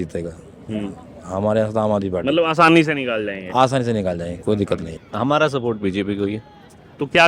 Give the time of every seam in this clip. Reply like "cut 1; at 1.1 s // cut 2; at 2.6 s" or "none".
cut 1; at 5.0 s